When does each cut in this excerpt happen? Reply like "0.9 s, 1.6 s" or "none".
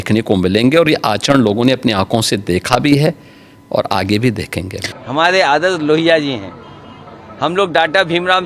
4.9 s